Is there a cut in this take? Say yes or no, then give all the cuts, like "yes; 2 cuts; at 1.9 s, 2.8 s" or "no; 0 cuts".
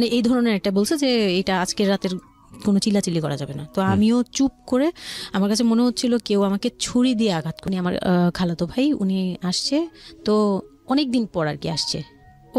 yes; 1 cut; at 7.6 s